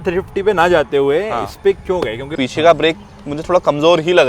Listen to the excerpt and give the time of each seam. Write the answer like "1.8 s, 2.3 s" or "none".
2.3 s